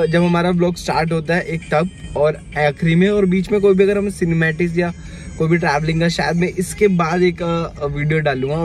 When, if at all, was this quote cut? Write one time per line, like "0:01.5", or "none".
none

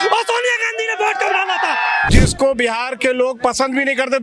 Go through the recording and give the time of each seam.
0:02.1

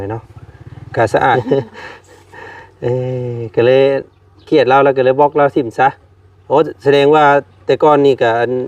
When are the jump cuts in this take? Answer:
0:01.4

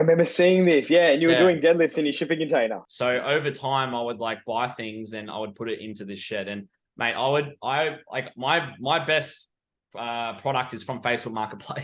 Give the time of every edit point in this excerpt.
0:02.8

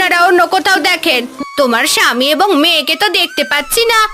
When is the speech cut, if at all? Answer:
0:01.4

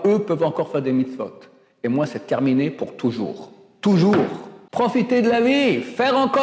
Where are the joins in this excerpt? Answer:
0:04.6

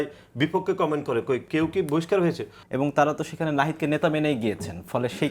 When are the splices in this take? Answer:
0:02.5

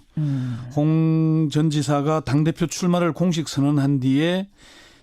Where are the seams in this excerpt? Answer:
0:02.0

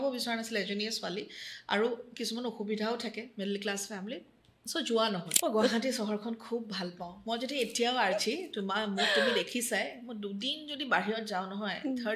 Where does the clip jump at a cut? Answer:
0:05.3

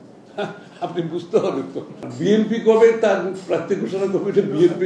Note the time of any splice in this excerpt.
0:02.0

